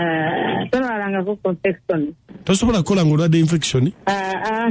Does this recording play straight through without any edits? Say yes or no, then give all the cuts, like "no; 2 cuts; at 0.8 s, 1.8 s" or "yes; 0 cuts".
yes; 0 cuts